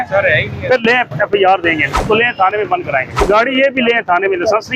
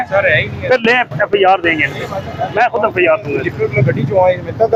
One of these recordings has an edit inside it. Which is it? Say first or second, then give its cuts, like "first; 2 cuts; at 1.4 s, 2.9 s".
first; 2 cuts; at 1.9 s, 3.2 s